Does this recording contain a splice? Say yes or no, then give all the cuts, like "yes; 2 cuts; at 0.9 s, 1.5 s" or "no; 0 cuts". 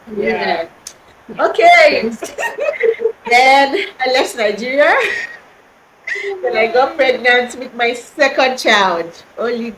no; 0 cuts